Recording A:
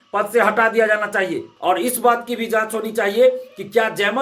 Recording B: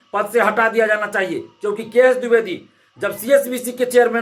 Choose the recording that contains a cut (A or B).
A